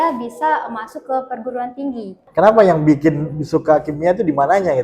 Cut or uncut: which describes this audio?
cut